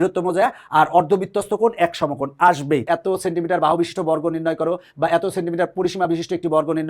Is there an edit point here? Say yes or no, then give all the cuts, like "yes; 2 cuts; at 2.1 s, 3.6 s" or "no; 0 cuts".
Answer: yes; 1 cut; at 2.9 s